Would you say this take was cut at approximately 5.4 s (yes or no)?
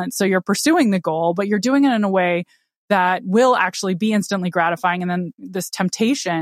yes